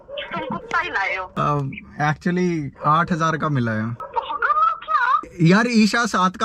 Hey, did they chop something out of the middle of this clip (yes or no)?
yes